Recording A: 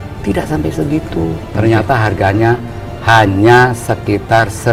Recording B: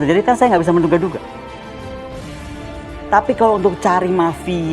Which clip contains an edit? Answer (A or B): B